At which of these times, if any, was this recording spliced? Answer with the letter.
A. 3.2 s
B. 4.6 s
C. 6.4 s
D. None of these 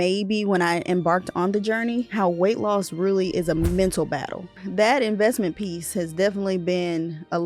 B